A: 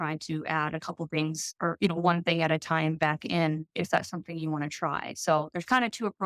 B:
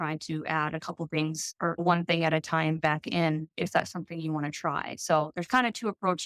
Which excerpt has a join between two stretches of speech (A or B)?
B